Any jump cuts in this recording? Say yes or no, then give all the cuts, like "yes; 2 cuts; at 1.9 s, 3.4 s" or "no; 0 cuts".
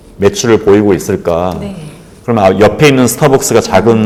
no; 0 cuts